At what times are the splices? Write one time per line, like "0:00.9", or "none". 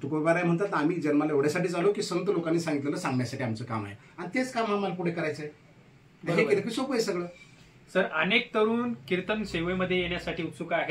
none